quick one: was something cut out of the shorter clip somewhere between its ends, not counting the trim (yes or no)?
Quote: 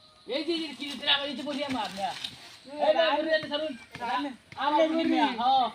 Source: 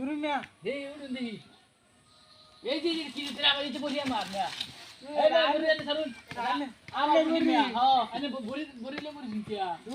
no